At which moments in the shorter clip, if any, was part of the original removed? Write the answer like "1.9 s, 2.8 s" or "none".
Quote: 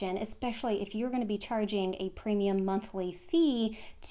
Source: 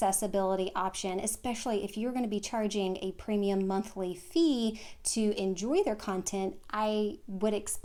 none